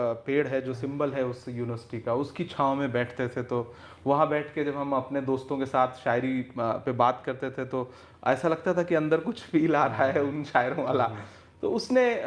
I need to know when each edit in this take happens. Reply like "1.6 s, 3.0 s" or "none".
none